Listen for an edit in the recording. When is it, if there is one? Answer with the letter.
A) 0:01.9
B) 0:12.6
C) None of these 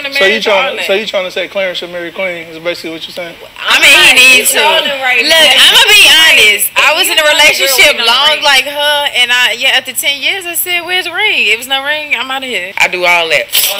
B